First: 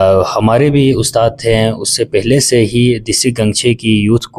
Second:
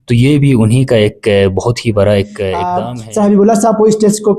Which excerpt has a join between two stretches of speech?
second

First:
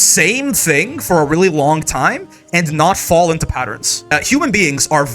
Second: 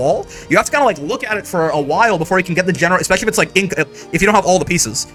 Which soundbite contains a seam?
first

